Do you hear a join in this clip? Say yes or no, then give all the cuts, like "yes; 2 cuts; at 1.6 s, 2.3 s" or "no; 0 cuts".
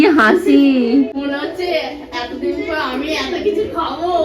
yes; 1 cut; at 1.1 s